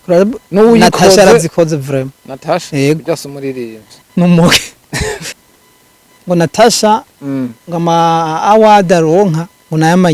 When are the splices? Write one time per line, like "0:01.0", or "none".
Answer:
0:05.2